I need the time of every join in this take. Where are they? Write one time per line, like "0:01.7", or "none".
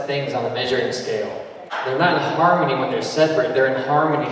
0:01.7